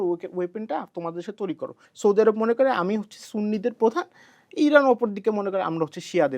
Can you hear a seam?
yes; 1 cut; at 1.8 s

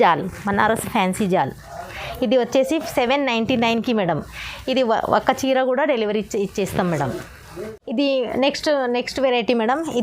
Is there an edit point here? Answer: no; 0 cuts

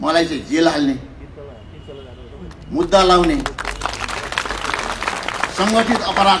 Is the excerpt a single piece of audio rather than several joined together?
yes; 0 cuts

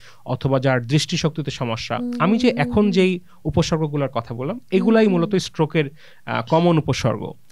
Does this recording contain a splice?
no; 0 cuts

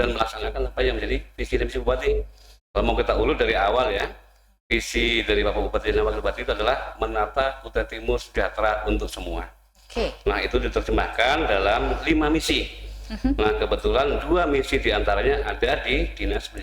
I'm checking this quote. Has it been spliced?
no; 0 cuts

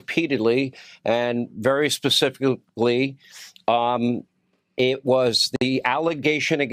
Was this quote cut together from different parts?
no; 0 cuts

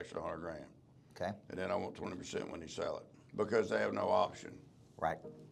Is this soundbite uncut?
no; 1 cut; at 3.2 s

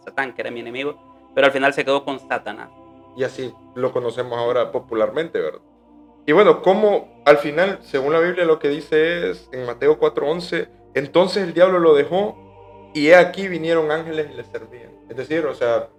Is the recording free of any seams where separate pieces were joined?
yes; 0 cuts

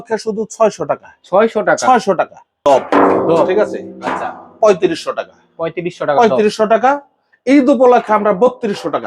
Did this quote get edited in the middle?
yes; 1 cut; at 2.4 s

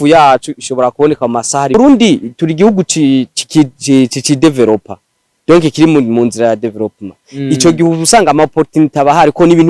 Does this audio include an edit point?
yes; 1 cut; at 1.7 s

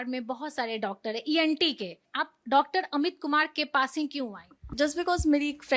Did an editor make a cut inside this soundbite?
yes; 1 cut; at 2.0 s

